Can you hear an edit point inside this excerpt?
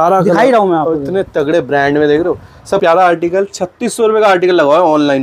yes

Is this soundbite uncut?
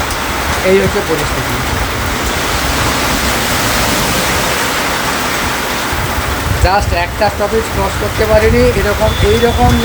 yes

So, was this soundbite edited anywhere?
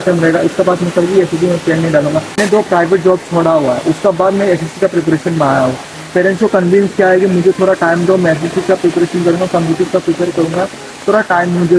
no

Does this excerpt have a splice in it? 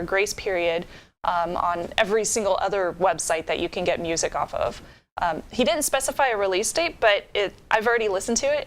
yes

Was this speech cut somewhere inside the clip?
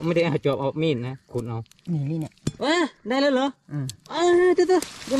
no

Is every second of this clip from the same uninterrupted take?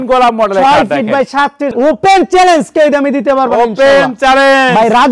no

